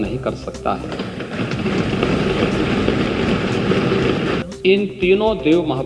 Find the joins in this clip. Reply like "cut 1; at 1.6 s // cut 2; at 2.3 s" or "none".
cut 1; at 4.4 s